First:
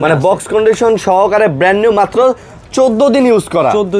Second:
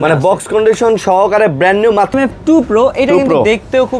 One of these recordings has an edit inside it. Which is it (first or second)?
second